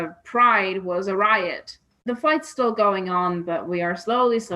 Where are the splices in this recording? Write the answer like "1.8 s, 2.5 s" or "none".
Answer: 2.0 s